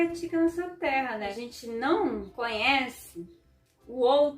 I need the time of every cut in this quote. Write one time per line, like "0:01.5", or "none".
0:01.3